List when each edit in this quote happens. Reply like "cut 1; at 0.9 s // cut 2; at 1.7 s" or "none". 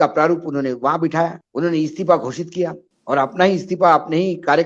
cut 1; at 1.4 s // cut 2; at 2.9 s

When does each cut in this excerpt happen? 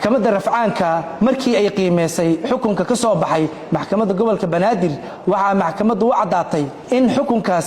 cut 1; at 5.1 s // cut 2; at 6.8 s

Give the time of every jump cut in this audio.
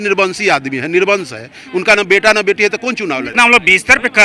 cut 1; at 3.3 s

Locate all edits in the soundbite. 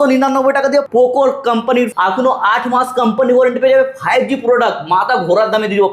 cut 1; at 0.9 s // cut 2; at 1.9 s

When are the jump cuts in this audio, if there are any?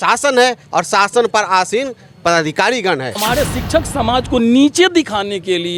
cut 1; at 3.2 s

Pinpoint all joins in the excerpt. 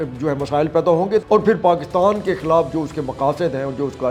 cut 1; at 1.2 s

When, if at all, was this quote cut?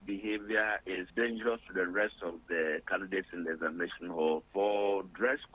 cut 1; at 0.9 s // cut 2; at 4.5 s

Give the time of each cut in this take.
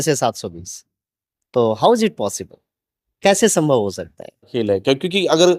cut 1; at 4.5 s

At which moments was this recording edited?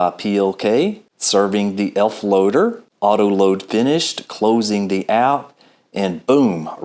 cut 1; at 1.1 s // cut 2; at 2.9 s

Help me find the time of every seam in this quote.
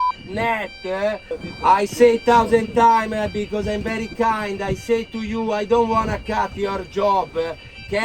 cut 1; at 1.3 s

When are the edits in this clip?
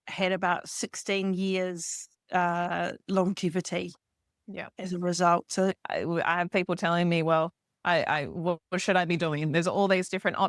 cut 1; at 5.8 s

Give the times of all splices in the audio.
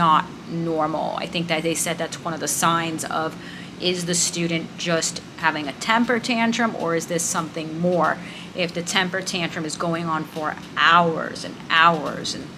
none

